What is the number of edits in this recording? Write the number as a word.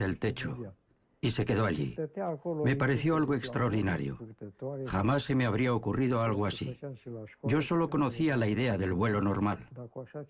zero